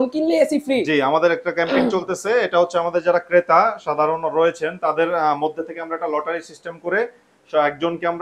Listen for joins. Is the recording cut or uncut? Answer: uncut